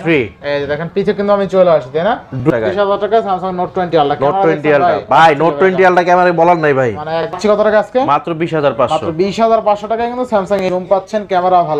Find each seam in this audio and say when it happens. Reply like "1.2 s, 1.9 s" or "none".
2.4 s, 7.4 s, 10.6 s